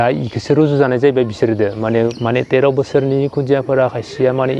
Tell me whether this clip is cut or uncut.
cut